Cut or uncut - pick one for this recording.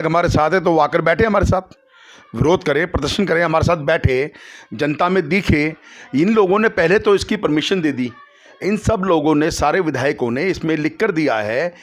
uncut